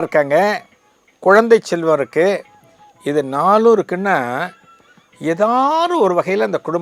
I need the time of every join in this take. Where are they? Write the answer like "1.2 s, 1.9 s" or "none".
none